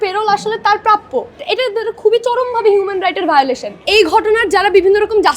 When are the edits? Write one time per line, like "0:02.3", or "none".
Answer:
0:01.4
0:03.7